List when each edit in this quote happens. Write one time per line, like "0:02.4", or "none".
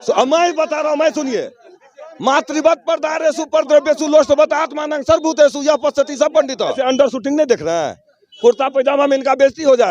0:06.8